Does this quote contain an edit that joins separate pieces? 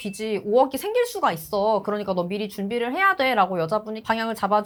no; 0 cuts

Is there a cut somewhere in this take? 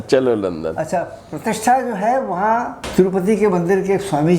yes; 2 cuts; at 0.8 s, 2.8 s

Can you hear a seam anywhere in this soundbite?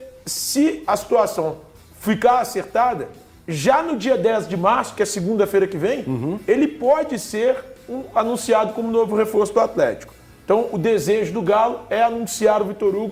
no; 0 cuts

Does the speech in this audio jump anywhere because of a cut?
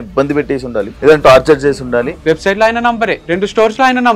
yes; 3 cuts; at 0.9 s, 2.1 s, 3.2 s

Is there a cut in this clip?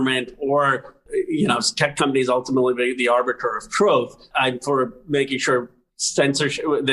yes; 2 cuts; at 1.0 s, 4.3 s

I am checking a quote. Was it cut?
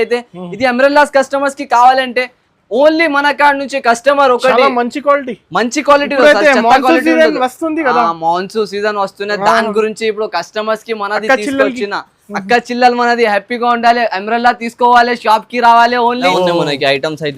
yes; 1 cut; at 16.3 s

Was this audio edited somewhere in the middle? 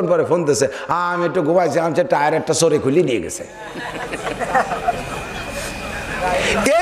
no; 0 cuts

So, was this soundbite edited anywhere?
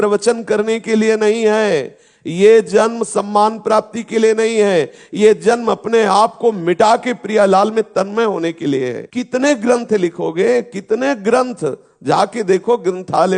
yes; 1 cut; at 9.0 s

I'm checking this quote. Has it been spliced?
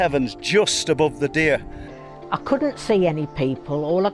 yes; 1 cut; at 1.8 s

